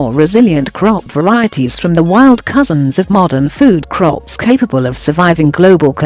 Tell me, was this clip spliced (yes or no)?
no